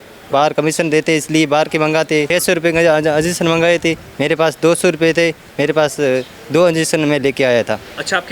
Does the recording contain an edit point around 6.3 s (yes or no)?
no